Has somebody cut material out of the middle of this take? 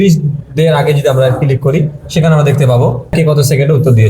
yes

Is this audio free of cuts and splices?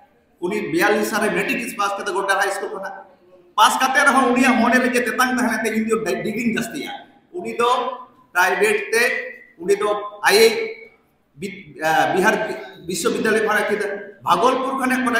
no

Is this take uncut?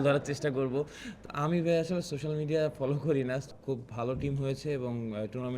no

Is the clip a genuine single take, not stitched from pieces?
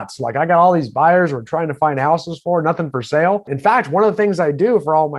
no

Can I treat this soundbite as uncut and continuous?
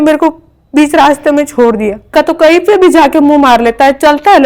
no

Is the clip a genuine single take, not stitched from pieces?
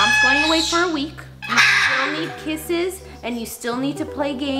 no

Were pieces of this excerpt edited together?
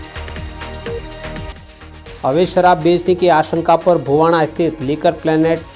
yes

